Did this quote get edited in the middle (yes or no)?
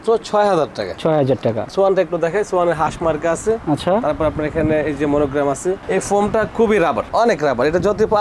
yes